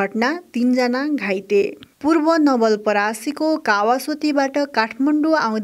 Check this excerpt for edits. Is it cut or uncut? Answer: cut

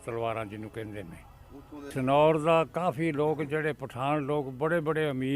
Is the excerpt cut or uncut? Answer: cut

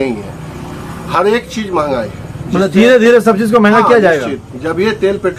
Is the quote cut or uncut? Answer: uncut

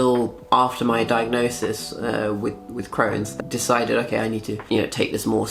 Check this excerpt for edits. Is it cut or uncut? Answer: cut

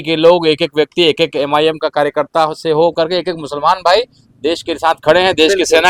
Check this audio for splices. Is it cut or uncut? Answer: uncut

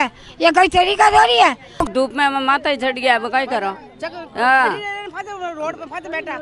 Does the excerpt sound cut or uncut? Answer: cut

